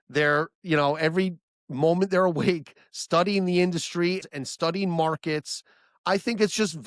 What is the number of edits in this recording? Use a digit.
1